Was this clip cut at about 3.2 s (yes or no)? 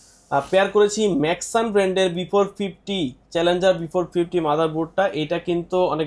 no